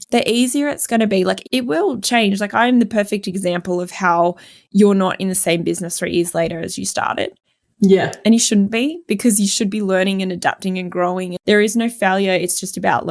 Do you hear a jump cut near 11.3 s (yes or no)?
yes